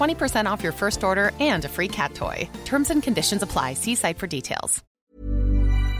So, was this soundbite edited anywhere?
yes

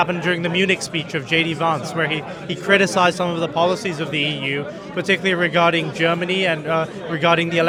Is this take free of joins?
yes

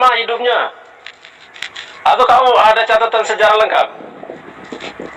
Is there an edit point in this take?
no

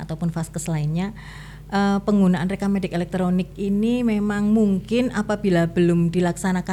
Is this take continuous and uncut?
yes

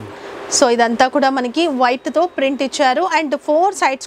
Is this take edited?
no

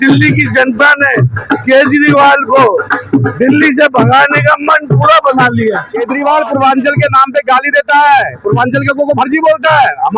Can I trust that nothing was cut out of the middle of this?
no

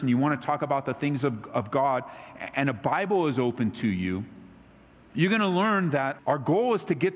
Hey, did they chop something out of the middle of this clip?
yes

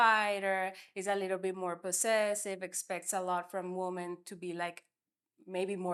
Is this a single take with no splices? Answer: yes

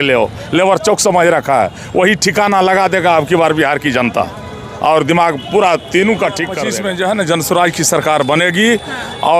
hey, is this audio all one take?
no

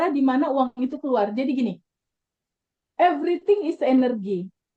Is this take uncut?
yes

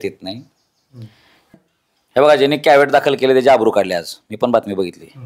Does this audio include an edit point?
yes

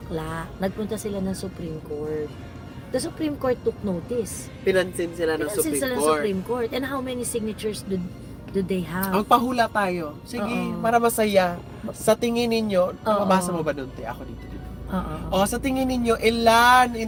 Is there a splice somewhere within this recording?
no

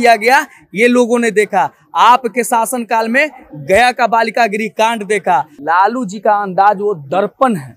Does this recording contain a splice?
yes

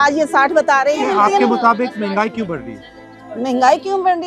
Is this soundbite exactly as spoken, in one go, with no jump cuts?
yes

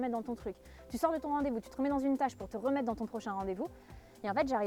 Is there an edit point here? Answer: no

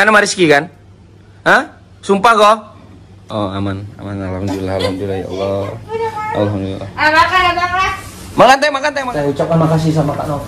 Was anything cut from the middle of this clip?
yes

